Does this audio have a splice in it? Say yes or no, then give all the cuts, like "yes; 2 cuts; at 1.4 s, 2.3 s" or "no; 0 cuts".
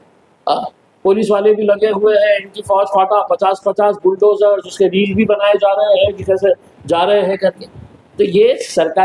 no; 0 cuts